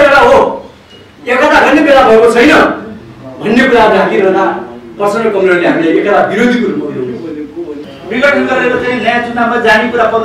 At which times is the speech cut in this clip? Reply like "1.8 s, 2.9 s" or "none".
7.9 s